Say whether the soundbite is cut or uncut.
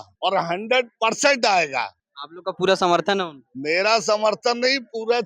uncut